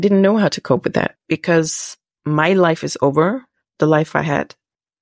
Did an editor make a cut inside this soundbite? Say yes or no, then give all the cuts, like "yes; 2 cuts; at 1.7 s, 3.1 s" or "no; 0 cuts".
yes; 1 cut; at 1.1 s